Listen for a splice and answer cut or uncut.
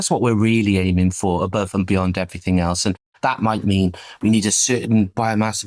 uncut